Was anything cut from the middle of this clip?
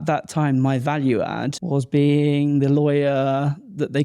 yes; 1 cut; at 1.5 s

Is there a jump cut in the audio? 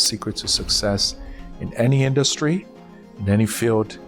no; 0 cuts

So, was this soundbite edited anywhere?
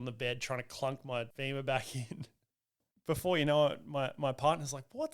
yes; 2 cuts; at 1.3 s, 2.9 s

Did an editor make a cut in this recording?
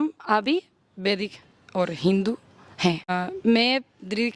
yes; 1 cut; at 3.1 s

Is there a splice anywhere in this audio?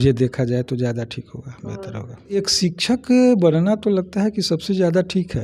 yes; 1 cut; at 2.4 s

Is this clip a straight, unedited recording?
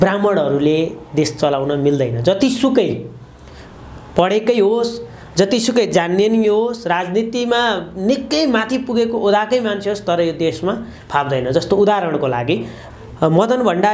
no; 1 cut; at 12.8 s

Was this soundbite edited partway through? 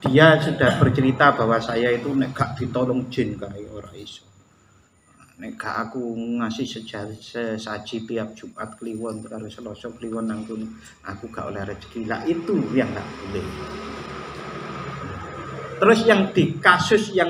no; 0 cuts

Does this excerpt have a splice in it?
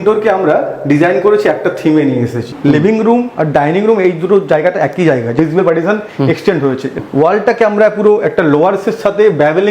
yes; 3 cuts; at 2.5 s, 5.3 s, 7.0 s

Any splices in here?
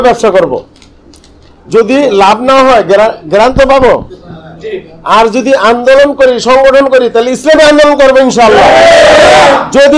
no; 0 cuts

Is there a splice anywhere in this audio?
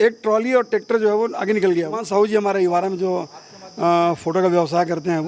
yes; 1 cut; at 2.0 s

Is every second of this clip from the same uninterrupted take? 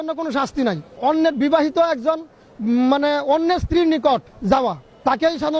no; 2 cuts; at 0.9 s, 4.5 s

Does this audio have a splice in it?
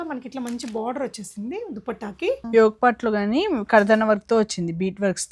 yes; 1 cut; at 2.4 s

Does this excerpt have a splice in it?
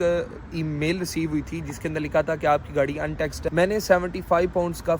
yes; 1 cut; at 3.4 s

